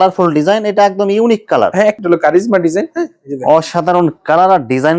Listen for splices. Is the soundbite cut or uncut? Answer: cut